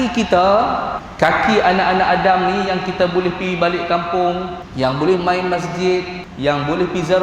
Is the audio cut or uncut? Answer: cut